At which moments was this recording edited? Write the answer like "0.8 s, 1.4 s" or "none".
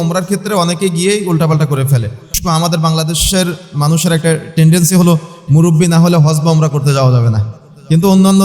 2.4 s